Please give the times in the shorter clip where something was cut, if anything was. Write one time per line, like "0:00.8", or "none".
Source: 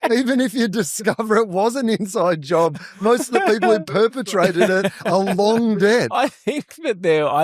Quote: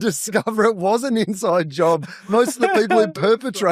none